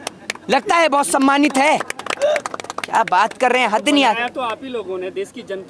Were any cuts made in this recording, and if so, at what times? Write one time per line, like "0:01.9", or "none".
none